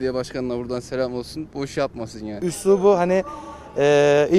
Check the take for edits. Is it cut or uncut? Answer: cut